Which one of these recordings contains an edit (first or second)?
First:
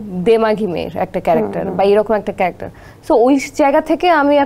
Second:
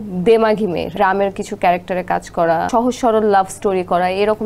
second